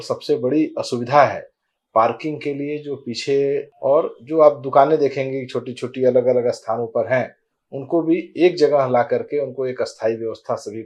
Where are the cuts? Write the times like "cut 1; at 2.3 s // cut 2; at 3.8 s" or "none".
cut 1; at 3.7 s